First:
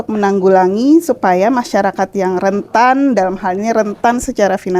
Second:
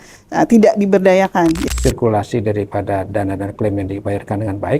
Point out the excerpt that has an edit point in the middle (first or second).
second